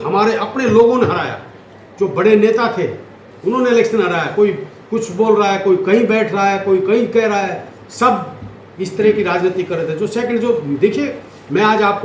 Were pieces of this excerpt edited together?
no; 0 cuts

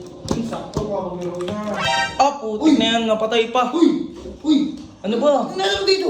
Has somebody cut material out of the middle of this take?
no; 0 cuts

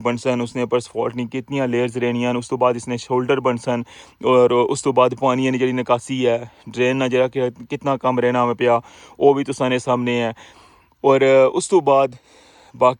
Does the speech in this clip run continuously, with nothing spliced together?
yes; 0 cuts

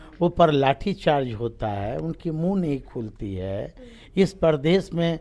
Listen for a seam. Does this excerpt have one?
no; 0 cuts

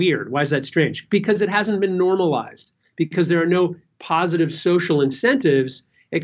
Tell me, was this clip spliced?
no; 0 cuts

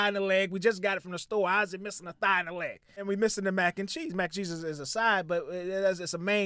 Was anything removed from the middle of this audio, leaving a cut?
yes; 1 cut; at 3.0 s

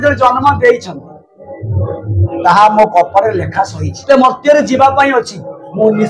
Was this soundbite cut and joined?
yes; 1 cut; at 4.0 s

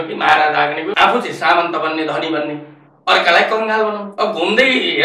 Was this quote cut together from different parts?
yes; 2 cuts; at 0.9 s, 4.1 s

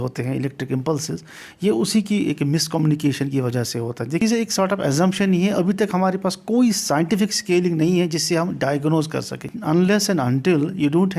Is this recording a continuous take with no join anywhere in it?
no; 2 cuts; at 4.2 s, 9.5 s

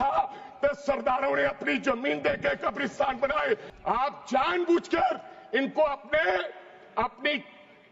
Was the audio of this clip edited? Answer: yes; 1 cut; at 3.7 s

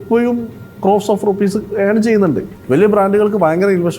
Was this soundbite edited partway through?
yes; 1 cut; at 2.5 s

